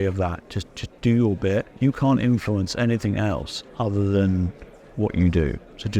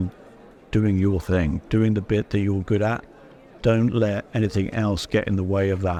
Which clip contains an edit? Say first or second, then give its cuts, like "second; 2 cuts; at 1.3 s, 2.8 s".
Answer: first; 1 cut; at 1.7 s